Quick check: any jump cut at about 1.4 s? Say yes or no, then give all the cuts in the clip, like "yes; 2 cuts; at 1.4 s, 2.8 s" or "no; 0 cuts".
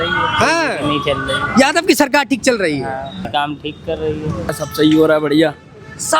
no; 1 cut; at 4.5 s